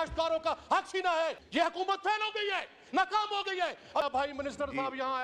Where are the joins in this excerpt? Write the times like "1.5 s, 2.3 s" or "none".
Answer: 1.4 s, 4.0 s